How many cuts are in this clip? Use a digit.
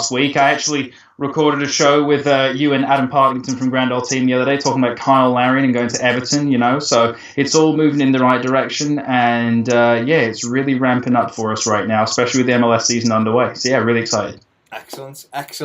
1